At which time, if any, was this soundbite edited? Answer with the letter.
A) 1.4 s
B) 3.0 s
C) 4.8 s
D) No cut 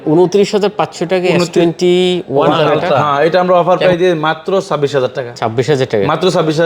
B